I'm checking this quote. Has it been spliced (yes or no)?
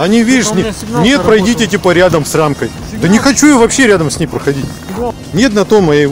yes